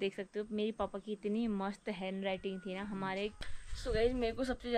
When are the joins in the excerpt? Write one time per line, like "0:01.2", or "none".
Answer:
0:03.4